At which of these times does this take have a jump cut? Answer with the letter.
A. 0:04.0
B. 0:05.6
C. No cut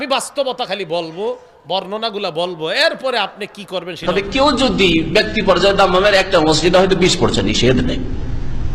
A